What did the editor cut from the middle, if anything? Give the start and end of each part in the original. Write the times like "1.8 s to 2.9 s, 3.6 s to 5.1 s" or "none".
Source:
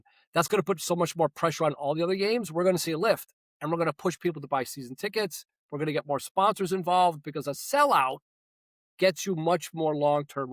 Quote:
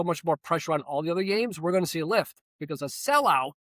3.5 s to 7.2 s